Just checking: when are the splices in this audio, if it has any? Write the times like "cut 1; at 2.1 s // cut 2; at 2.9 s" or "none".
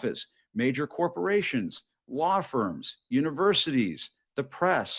none

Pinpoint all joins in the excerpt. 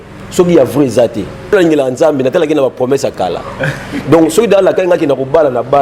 cut 1; at 1.5 s

